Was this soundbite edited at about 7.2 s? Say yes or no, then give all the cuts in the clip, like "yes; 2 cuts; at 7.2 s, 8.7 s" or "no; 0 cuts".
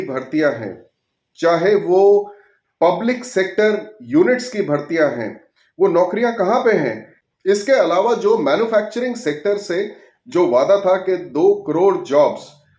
no; 0 cuts